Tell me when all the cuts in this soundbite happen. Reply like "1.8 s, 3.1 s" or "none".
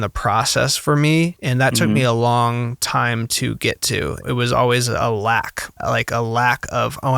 1.4 s, 4.2 s, 5.8 s